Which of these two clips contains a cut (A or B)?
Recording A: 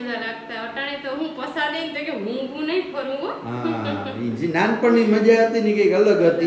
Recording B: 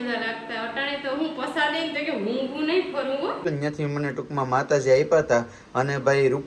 B